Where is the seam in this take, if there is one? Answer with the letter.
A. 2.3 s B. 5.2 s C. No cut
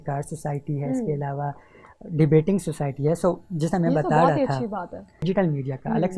B